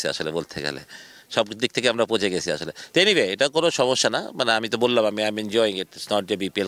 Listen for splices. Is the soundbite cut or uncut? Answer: uncut